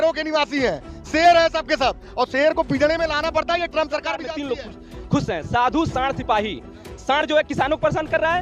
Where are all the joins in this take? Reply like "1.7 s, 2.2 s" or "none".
4.3 s